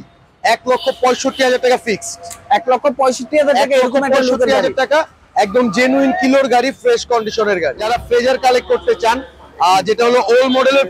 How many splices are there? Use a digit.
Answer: 1